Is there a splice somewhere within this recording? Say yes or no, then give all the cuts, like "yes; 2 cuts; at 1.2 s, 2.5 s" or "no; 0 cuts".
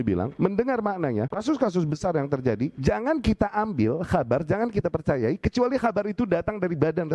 yes; 1 cut; at 1.4 s